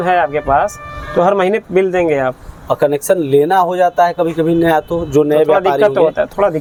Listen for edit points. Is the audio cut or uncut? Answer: uncut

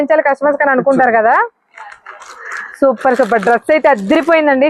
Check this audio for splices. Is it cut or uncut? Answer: uncut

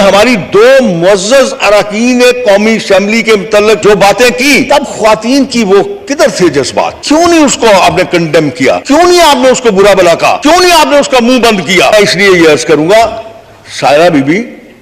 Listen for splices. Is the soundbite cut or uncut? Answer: cut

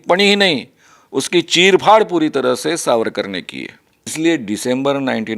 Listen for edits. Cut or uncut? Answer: cut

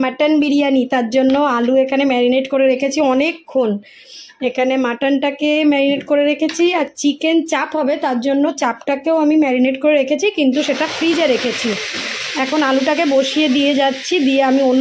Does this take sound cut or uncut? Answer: uncut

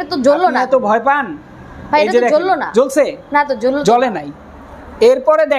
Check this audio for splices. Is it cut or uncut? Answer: uncut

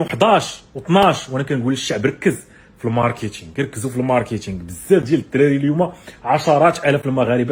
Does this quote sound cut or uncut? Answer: uncut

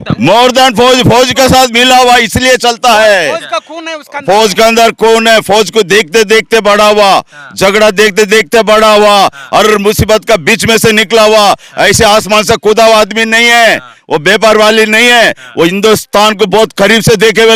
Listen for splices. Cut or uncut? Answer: uncut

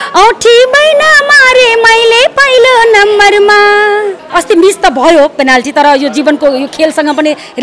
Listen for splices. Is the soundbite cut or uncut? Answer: cut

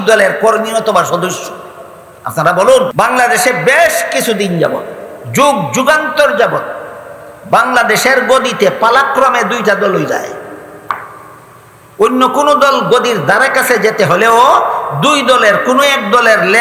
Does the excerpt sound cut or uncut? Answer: cut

